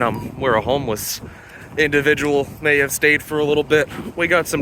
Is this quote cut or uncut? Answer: uncut